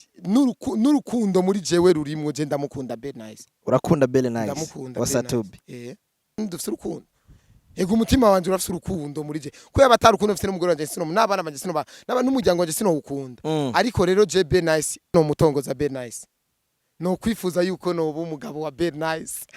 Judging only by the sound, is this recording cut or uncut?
cut